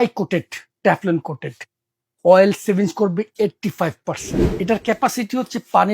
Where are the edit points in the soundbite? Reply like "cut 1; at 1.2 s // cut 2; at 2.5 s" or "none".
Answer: cut 1; at 4.4 s